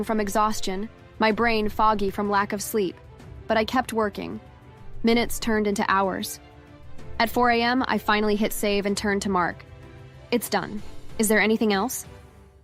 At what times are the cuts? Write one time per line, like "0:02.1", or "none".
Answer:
none